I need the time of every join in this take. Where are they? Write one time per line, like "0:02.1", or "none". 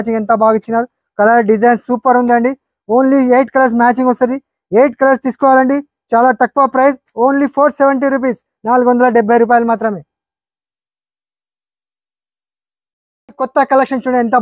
none

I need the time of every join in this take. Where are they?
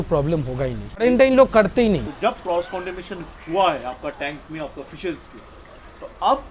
0:01.0
0:02.1

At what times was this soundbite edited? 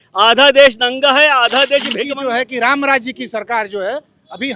0:02.0

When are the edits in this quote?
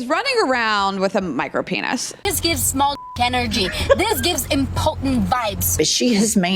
0:02.2

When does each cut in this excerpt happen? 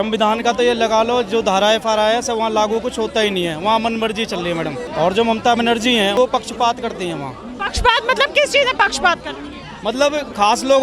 0:04.9
0:06.2

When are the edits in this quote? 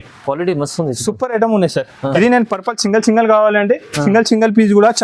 0:02.2

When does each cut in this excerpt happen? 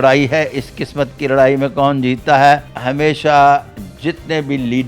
0:02.7

